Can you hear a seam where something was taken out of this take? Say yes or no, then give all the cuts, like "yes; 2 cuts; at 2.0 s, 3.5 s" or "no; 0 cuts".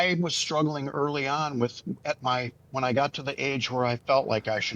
no; 0 cuts